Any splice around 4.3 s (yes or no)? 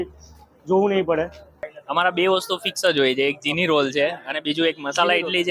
no